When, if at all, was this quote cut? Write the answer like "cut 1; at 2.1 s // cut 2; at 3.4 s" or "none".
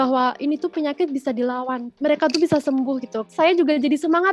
cut 1; at 1.9 s // cut 2; at 3.3 s